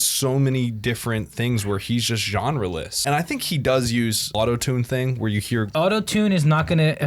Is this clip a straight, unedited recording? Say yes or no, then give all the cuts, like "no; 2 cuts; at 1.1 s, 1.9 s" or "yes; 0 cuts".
no; 3 cuts; at 2.9 s, 4.3 s, 5.7 s